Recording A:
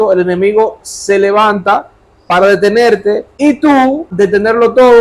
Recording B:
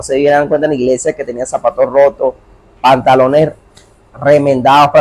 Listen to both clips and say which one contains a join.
A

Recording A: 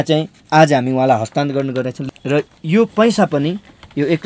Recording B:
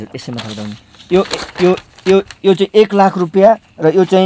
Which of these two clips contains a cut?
A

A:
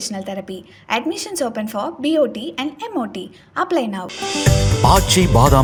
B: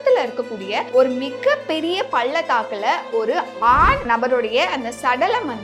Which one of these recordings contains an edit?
B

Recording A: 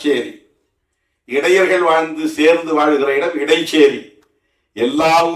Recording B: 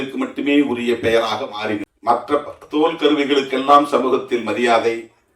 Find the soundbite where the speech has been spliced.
B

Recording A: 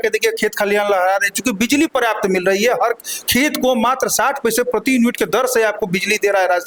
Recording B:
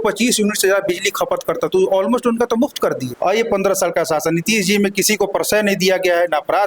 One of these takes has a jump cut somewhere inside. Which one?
B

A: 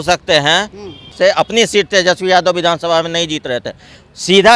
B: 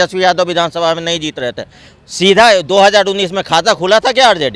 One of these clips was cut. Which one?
A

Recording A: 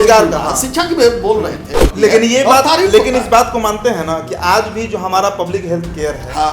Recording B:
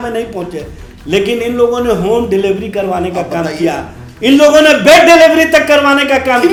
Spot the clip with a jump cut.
A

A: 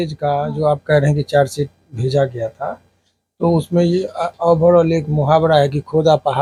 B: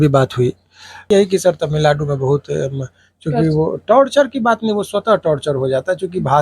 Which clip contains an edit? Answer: B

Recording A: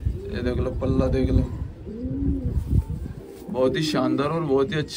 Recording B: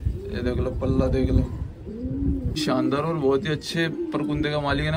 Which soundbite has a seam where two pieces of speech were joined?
B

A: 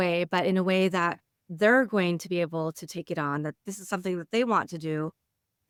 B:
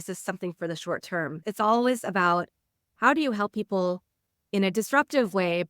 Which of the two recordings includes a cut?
B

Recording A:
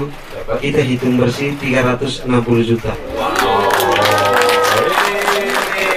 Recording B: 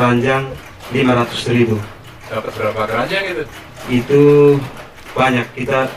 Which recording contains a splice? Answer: A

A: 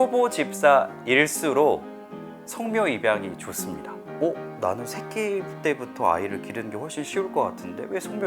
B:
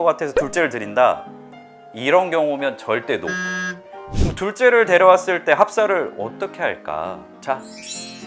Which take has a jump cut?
B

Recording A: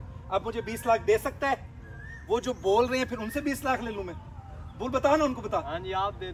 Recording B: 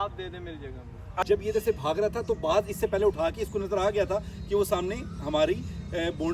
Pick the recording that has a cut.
B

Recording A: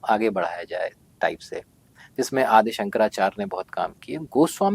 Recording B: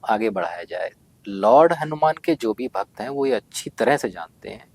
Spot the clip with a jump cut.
B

